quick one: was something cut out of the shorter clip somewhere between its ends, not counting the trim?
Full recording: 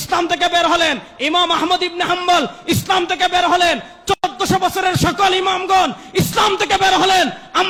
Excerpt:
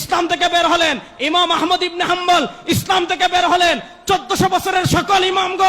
yes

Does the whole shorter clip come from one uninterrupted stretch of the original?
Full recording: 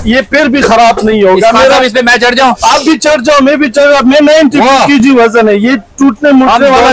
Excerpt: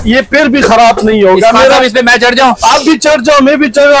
yes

